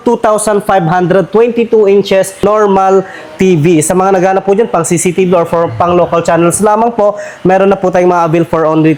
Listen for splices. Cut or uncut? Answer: uncut